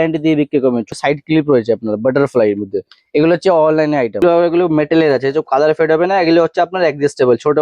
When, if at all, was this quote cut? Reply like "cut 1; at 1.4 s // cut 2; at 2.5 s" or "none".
cut 1; at 0.9 s // cut 2; at 4.2 s